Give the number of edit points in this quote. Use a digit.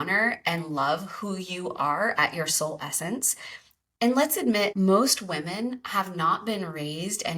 1